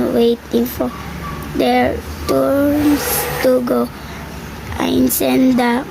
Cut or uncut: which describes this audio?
uncut